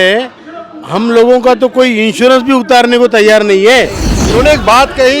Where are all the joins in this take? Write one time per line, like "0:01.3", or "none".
0:04.0